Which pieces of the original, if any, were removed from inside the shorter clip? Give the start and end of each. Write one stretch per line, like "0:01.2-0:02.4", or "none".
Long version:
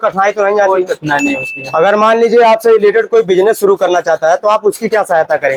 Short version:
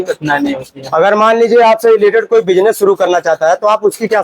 none